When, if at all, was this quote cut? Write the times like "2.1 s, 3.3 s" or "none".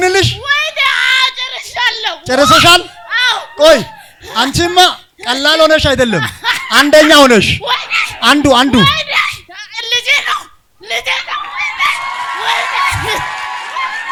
none